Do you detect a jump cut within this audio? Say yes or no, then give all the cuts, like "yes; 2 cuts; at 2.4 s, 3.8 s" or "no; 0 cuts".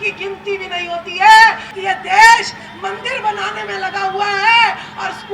yes; 1 cut; at 1.7 s